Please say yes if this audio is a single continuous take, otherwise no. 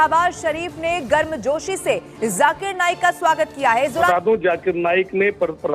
no